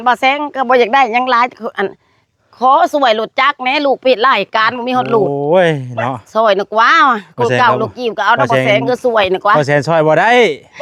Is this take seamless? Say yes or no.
yes